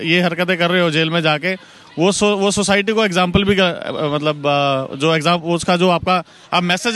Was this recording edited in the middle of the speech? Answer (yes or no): no